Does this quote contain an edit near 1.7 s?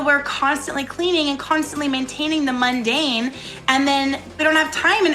no; 1 cut; at 4.2 s

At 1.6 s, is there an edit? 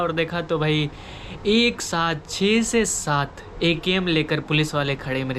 no; 0 cuts

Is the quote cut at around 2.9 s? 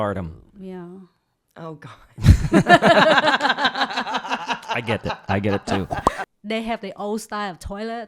no; 1 cut; at 6.2 s

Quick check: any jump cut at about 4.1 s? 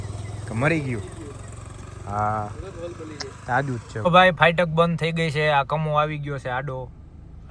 yes; 1 cut; at 4.1 s

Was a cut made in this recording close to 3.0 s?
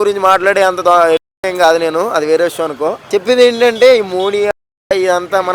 yes; 1 cut; at 3.0 s

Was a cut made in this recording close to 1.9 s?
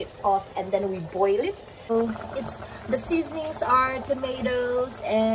yes; 1 cut; at 1.9 s

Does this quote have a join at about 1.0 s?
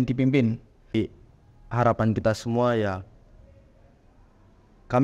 yes; 1 cut; at 1.0 s

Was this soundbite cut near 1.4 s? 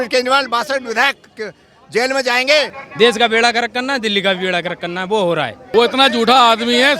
no; 2 cuts; at 2.8 s, 5.6 s

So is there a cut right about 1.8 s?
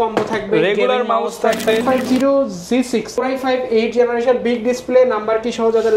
yes; 2 cuts; at 1.8 s, 3.1 s

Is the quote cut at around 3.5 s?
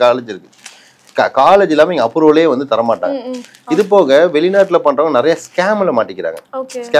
no; 0 cuts

